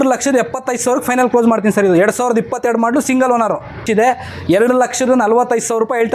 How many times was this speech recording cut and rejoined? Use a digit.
1